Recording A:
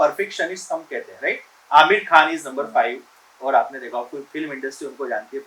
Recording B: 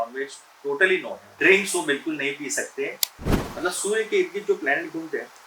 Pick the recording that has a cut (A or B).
B